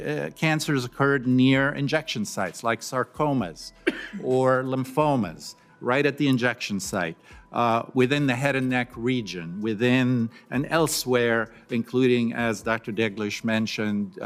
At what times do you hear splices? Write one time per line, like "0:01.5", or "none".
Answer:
none